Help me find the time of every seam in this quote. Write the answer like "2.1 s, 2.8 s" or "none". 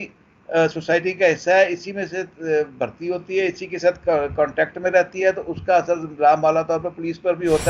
none